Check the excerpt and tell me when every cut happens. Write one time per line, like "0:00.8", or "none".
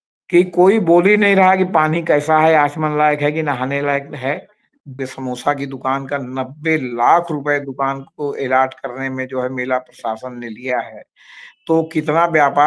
0:05.0